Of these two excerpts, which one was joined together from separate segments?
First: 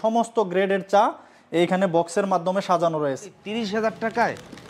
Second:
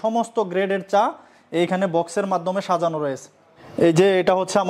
first; 1 cut; at 3.5 s

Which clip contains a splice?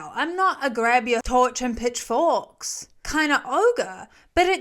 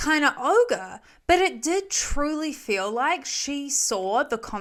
first; 1 cut; at 1.2 s

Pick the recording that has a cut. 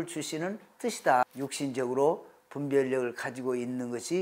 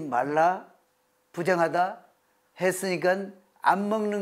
first; 1 cut; at 1.2 s

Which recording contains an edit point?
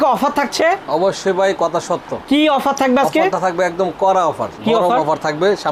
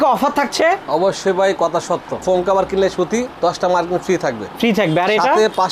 second; 1 cut; at 2.2 s

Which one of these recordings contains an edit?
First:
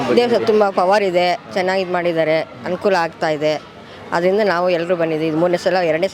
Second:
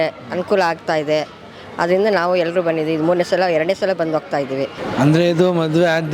second; 1 cut; at 4.8 s

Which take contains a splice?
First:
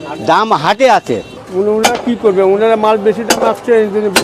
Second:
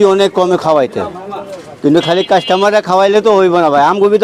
first; 1 cut; at 1.4 s

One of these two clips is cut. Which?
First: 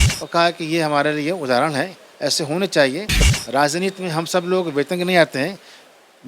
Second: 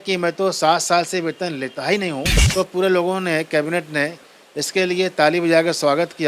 second; 1 cut; at 2.4 s

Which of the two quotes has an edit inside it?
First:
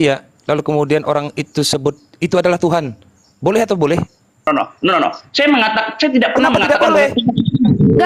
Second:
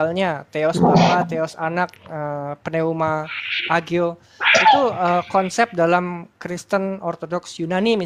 first; 1 cut; at 4.5 s

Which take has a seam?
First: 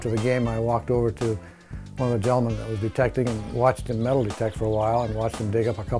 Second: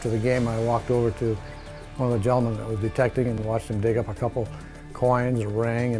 second; 1 cut; at 3.4 s

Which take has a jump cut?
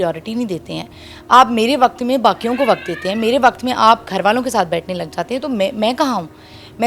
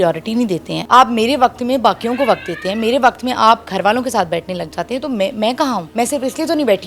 second; 2 cuts; at 0.8 s, 5.9 s

